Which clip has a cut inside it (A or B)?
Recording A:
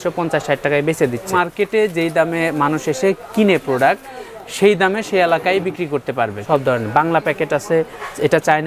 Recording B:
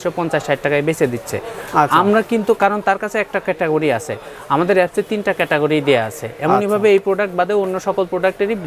A